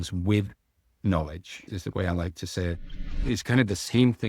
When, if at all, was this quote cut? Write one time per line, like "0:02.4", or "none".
0:01.5
0:03.2